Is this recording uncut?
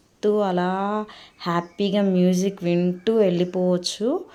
yes; 0 cuts

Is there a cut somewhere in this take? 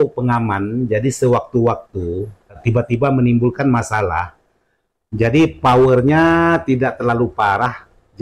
yes; 1 cut; at 3.0 s

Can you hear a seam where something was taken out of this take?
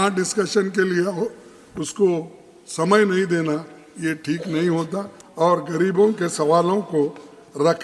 yes; 1 cut; at 5.2 s

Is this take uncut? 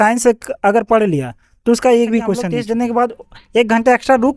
no; 1 cut; at 2.6 s

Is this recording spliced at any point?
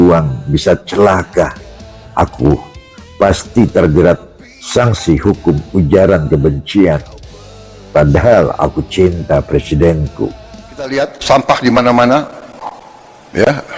yes; 1 cut; at 10.9 s

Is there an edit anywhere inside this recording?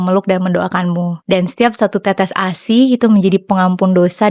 yes; 1 cut; at 1.2 s

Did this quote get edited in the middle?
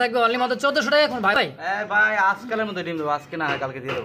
yes; 1 cut; at 1.4 s

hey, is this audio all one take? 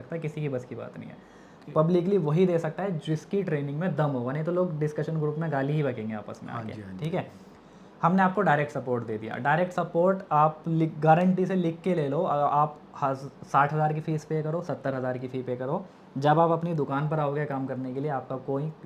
yes; 0 cuts

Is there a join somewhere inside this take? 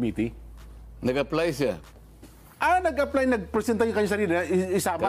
no; 0 cuts

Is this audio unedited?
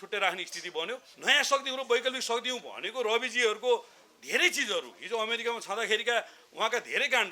no; 1 cut; at 1.1 s

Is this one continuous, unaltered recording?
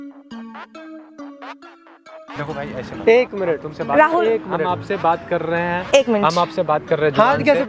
yes; 0 cuts

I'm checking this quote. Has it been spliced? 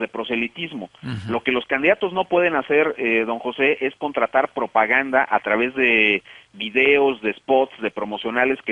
no; 0 cuts

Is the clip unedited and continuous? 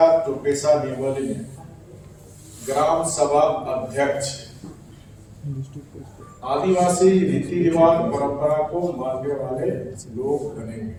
yes; 0 cuts

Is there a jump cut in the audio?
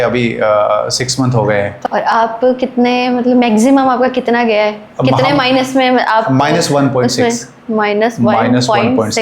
yes; 1 cut; at 1.8 s

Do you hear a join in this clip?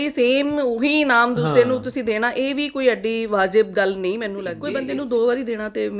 yes; 1 cut; at 4.5 s

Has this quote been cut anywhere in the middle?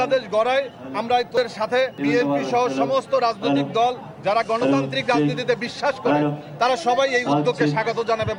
no; 0 cuts

